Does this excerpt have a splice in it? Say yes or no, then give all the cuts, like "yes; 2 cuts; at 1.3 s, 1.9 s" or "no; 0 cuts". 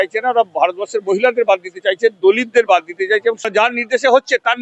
yes; 1 cut; at 3.5 s